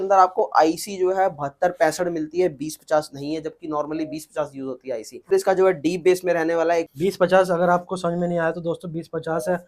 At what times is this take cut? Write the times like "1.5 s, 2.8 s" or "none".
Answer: 5.3 s, 6.8 s